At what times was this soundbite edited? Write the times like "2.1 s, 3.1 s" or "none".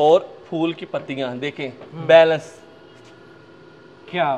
none